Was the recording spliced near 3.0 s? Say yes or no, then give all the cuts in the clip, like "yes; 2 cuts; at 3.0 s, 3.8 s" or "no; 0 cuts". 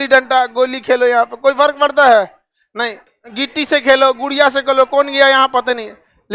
yes; 1 cut; at 3.0 s